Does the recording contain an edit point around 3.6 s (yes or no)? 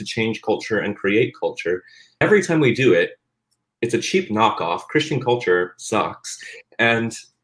no